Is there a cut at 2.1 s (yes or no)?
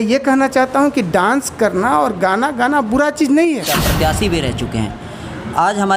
no